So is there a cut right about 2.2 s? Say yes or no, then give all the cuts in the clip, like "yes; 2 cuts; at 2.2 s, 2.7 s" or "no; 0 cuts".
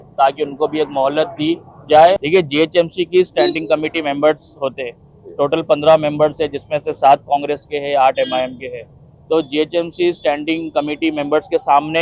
yes; 1 cut; at 2.2 s